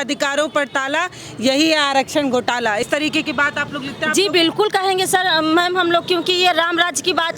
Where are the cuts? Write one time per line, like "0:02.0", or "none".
none

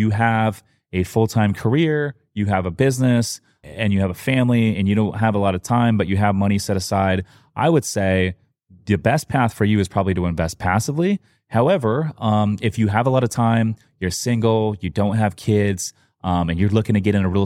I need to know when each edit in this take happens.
none

